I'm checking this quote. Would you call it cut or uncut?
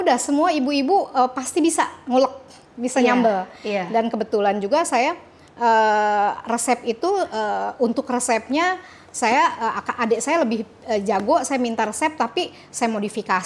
uncut